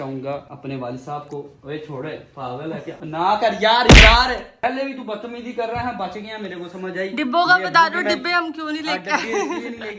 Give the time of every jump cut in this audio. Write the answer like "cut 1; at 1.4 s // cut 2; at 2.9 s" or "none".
none